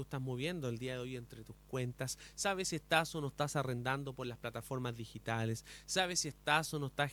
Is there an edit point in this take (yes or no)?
no